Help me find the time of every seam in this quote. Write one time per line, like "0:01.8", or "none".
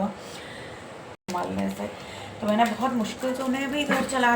0:01.1